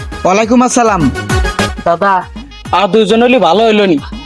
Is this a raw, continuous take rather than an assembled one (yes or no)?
no